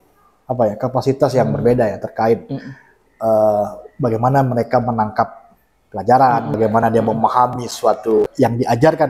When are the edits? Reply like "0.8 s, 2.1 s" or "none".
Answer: 6.5 s, 8.3 s